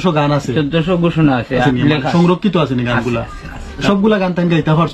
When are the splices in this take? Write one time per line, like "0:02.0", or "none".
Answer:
0:01.6
0:03.8

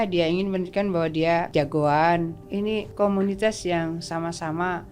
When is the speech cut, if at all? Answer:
0:01.5
0:02.8

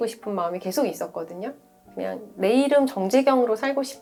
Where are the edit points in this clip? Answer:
none

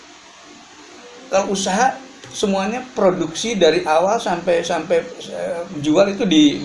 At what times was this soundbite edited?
none

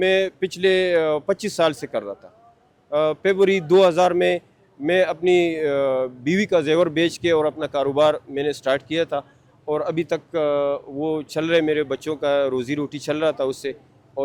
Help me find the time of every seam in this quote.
none

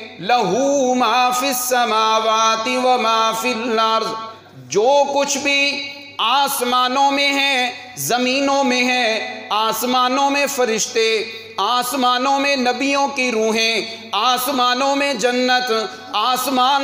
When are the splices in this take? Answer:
0:04.3

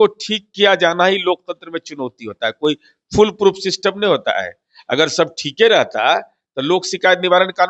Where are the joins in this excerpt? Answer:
none

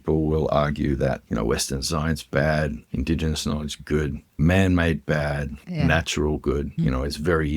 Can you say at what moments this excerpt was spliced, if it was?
0:01.2
0:02.8
0:04.4
0:05.6
0:06.7

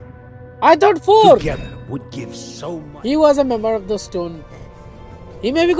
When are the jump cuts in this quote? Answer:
0:02.6

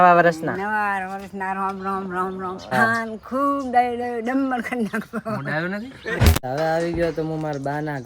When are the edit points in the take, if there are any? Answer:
0:02.7
0:06.4

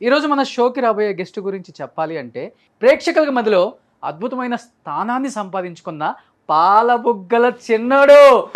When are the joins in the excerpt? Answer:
0:02.6

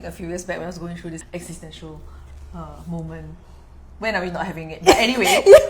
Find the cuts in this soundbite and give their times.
0:01.2

